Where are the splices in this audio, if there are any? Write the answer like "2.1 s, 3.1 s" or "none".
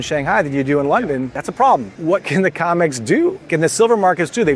1.4 s, 1.9 s, 3.5 s